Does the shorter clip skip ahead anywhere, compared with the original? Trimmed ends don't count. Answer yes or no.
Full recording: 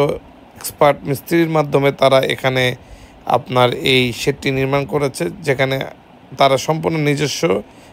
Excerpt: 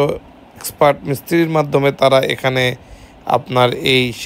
no